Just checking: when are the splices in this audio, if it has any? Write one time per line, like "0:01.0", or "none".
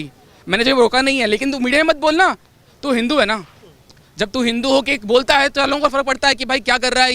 none